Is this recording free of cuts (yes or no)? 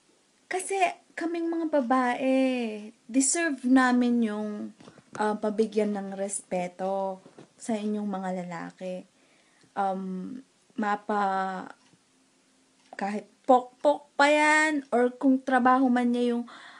no